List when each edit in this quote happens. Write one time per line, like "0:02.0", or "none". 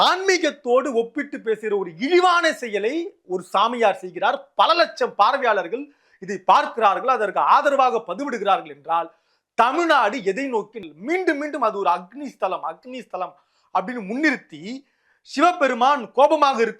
0:10.7